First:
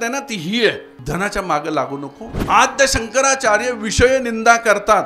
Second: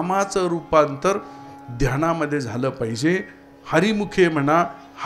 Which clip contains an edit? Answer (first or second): first